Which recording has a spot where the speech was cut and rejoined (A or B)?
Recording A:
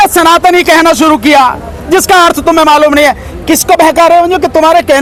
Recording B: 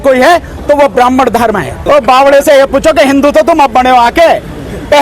B